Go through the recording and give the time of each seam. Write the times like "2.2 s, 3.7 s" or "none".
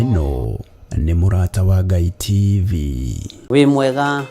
3.3 s